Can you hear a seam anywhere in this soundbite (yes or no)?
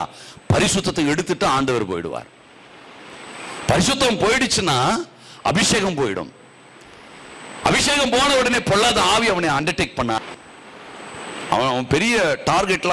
yes